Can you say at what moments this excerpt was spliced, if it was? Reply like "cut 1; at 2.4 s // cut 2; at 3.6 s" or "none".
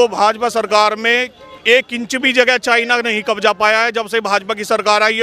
none